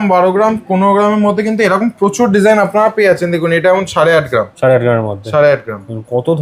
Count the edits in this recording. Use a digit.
0